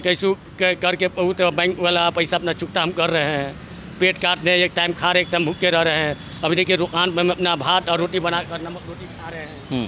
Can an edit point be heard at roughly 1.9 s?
no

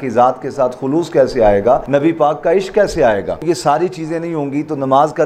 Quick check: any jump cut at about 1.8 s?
yes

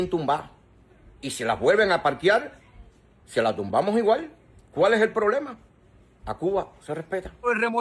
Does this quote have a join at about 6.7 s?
no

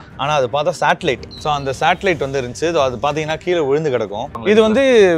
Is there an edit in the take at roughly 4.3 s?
yes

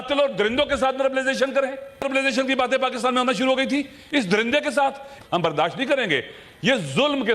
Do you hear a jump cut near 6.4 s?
no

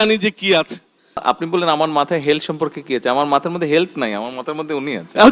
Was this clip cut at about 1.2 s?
yes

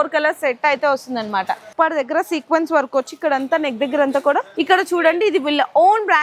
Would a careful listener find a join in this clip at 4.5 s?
yes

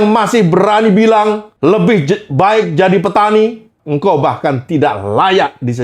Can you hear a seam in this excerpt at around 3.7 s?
yes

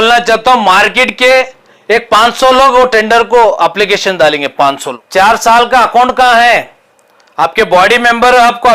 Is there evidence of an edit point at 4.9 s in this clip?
yes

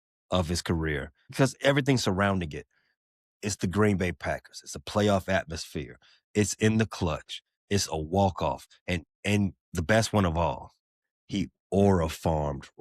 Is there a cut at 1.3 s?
yes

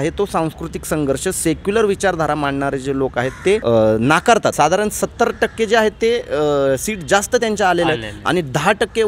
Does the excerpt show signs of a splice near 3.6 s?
yes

